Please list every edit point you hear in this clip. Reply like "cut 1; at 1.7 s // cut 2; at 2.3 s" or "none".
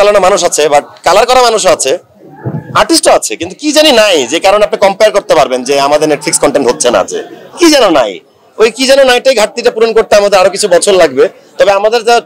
none